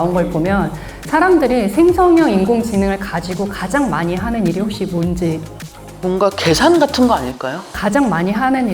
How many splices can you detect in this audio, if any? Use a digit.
1